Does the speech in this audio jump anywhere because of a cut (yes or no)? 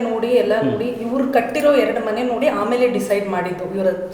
no